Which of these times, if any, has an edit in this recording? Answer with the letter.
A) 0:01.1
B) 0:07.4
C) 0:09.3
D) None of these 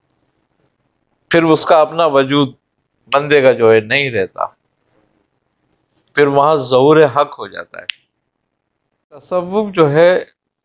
C